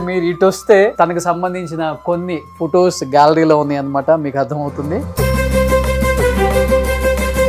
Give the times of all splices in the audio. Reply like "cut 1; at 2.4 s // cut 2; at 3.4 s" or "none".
cut 1; at 0.9 s